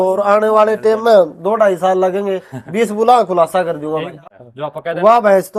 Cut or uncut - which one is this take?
cut